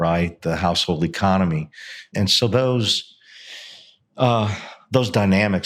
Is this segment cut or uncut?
cut